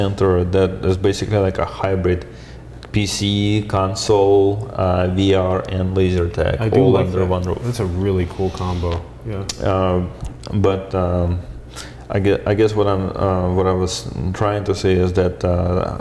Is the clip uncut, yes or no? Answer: yes